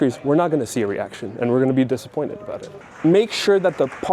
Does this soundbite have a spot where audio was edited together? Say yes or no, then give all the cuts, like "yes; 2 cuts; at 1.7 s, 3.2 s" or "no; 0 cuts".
yes; 1 cut; at 2.8 s